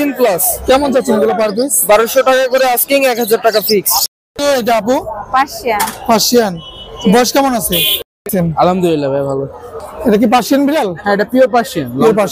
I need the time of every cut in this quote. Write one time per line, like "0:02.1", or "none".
0:04.0
0:08.0